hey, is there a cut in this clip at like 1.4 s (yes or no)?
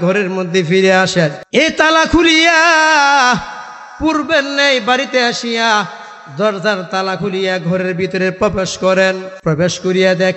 yes